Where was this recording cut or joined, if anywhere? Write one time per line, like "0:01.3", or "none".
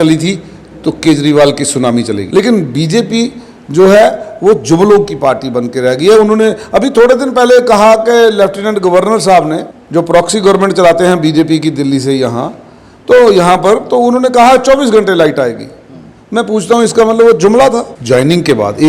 0:02.2
0:09.7
0:17.9